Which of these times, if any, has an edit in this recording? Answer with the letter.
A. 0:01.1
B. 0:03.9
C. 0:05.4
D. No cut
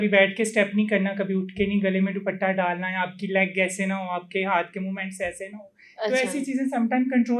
D